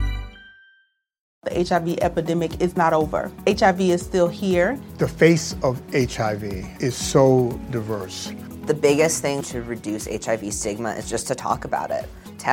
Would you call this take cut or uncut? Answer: cut